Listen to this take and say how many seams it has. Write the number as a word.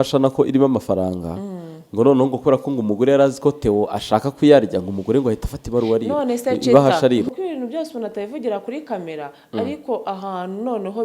one